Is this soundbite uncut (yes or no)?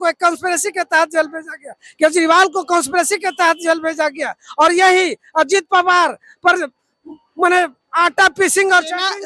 yes